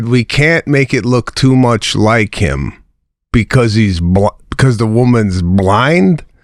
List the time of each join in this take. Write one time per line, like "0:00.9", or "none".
none